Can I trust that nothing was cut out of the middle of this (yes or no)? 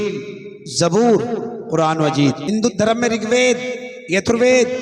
no